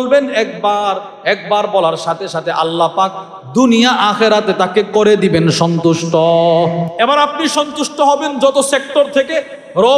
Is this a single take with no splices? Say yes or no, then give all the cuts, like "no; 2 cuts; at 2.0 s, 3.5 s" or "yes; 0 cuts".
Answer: no; 1 cut; at 6.9 s